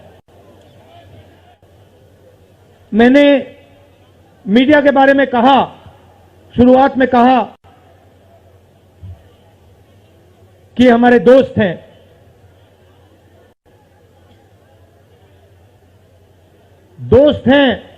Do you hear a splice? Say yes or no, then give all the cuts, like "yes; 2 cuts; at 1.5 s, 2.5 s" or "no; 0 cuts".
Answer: yes; 1 cut; at 1.4 s